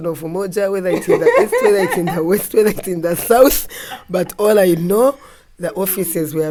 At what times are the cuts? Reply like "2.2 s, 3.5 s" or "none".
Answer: none

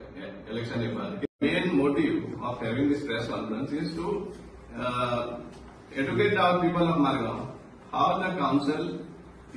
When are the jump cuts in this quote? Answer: 1.4 s

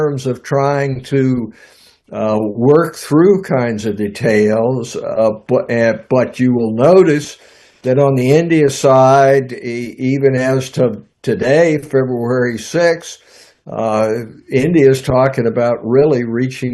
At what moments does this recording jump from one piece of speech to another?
none

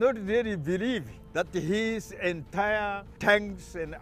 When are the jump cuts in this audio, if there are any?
1.2 s, 3.1 s

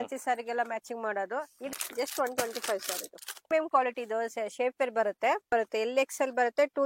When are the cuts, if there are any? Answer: 1.7 s, 3.5 s, 5.4 s

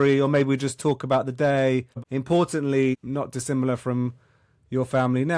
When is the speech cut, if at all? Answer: 2.1 s

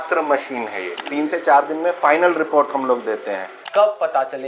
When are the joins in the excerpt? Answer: 1.0 s, 3.6 s

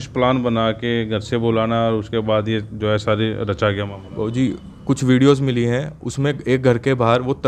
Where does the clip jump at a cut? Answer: none

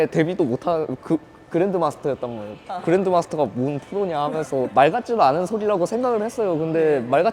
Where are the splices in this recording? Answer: 4.7 s

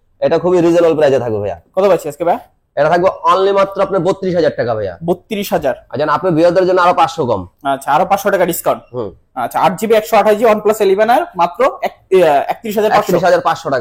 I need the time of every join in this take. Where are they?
none

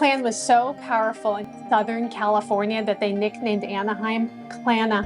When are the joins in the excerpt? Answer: 1.5 s

